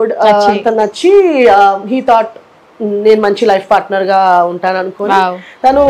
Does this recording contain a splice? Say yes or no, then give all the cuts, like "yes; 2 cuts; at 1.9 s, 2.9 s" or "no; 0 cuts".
no; 0 cuts